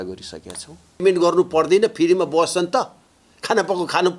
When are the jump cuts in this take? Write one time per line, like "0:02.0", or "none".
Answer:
0:01.0